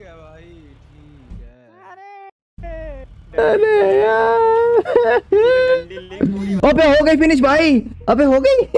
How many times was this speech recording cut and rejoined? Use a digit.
1